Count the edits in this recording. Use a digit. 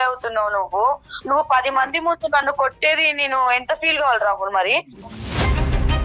1